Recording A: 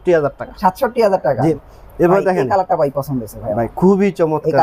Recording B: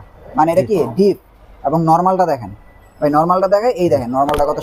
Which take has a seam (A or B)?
A